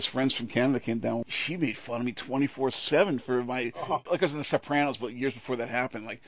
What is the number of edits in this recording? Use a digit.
1